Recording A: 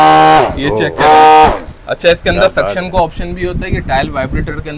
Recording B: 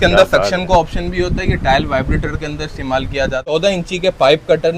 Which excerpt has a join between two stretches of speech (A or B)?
B